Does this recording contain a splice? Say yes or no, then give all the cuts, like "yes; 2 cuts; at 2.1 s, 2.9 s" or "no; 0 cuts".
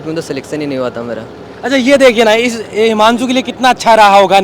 no; 0 cuts